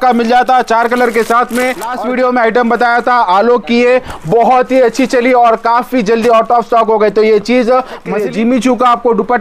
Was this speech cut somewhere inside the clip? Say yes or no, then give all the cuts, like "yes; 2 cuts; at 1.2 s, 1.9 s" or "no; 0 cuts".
yes; 2 cuts; at 1.9 s, 8.1 s